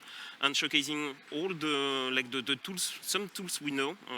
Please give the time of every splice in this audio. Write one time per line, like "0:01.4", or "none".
0:01.2